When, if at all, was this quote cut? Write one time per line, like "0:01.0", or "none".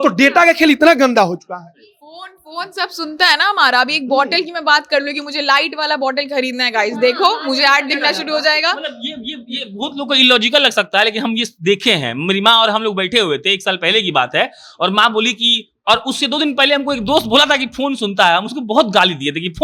none